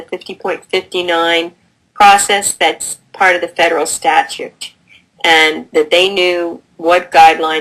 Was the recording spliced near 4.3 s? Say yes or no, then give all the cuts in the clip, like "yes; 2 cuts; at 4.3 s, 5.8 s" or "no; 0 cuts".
no; 1 cut; at 2.1 s